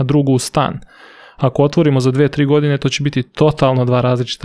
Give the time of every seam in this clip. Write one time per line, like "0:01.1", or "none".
none